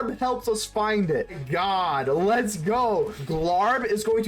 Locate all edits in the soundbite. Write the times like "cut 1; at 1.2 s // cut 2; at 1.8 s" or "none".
cut 1; at 1.4 s // cut 2; at 3.2 s